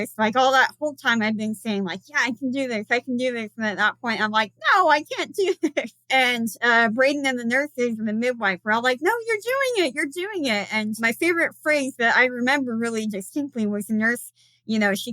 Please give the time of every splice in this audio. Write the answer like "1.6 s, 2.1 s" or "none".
6.0 s, 11.0 s